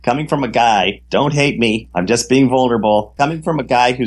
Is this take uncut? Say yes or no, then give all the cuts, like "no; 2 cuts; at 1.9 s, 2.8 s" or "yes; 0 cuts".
no; 1 cut; at 3.1 s